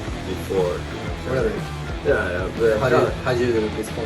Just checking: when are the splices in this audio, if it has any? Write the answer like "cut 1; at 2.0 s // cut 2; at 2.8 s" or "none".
none